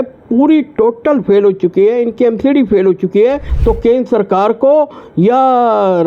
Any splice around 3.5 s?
yes; 1 cut; at 3.5 s

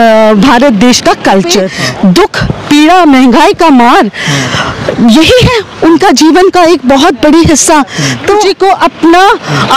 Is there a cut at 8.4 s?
yes; 2 cuts; at 1.7 s, 8.4 s

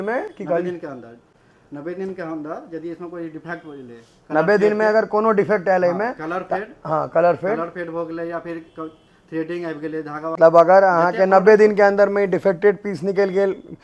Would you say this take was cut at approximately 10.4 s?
yes; 1 cut; at 10.4 s

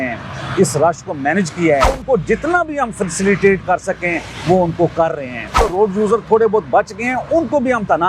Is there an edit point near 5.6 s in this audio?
yes; 2 cuts; at 2.0 s, 5.6 s

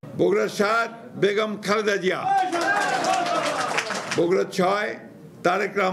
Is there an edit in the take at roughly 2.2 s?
no; 1 cut; at 4.0 s

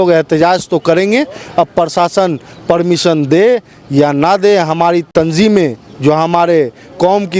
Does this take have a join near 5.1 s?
no; 0 cuts

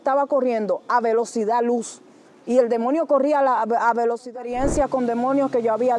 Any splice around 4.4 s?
yes; 1 cut; at 4.4 s

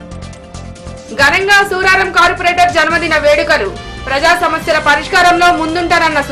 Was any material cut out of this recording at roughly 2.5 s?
no; 1 cut; at 0.9 s

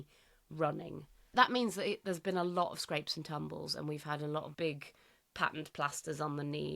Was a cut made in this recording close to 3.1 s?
no; 1 cut; at 1.3 s

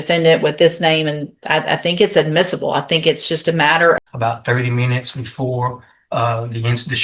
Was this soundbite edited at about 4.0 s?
yes; 1 cut; at 4.0 s

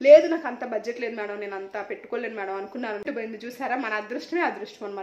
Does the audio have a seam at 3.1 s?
yes; 1 cut; at 3.1 s

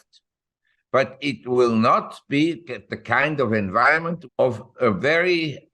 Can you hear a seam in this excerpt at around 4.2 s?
yes; 1 cut; at 4.2 s

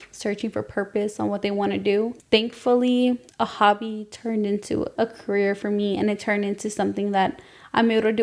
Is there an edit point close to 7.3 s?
no; 3 cuts; at 2.2 s, 3.3 s, 4.9 s

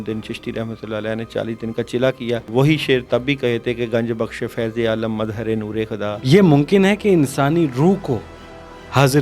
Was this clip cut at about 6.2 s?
yes; 2 cuts; at 2.5 s, 6.2 s

